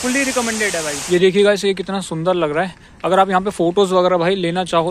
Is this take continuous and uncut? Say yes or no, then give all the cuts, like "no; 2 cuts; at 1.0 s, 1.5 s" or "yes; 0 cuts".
no; 1 cut; at 1.0 s